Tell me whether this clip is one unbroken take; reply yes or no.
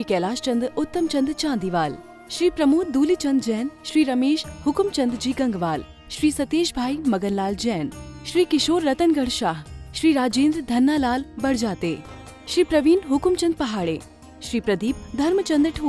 yes